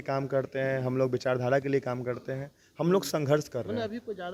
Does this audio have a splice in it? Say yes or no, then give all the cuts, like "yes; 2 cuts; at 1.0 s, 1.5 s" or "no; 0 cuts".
no; 0 cuts